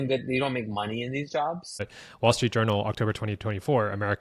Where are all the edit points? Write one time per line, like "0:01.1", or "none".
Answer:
0:01.7